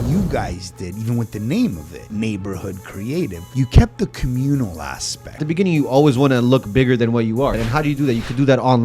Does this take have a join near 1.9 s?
yes; 4 cuts; at 1.9 s, 3.4 s, 5.4 s, 7.6 s

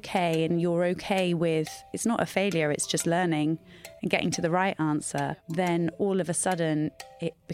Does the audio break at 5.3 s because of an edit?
yes; 1 cut; at 5.3 s

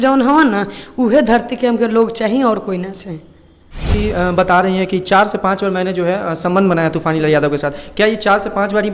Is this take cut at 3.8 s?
yes; 1 cut; at 3.8 s

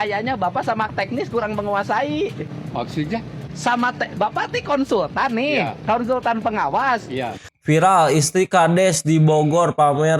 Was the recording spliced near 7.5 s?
yes; 1 cut; at 7.5 s

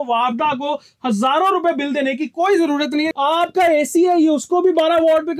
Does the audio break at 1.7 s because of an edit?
no; 1 cut; at 3.1 s

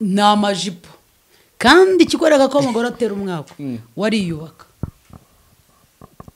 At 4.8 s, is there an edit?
no; 0 cuts

